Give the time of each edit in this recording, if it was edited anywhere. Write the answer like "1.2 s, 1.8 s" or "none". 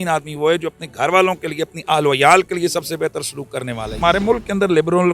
4.0 s